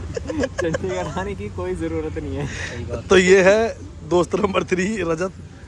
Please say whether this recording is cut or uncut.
uncut